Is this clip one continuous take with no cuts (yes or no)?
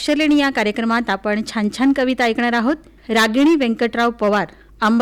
no